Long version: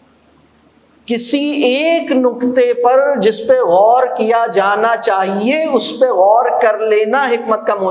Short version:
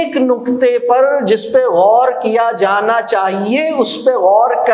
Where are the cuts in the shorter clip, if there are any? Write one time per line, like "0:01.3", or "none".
none